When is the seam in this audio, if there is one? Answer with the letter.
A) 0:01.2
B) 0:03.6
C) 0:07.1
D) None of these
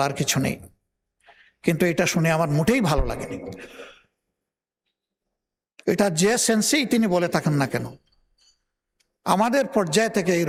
D